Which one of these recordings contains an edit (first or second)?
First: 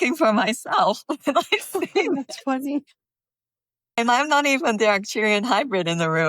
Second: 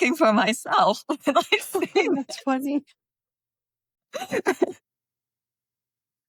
first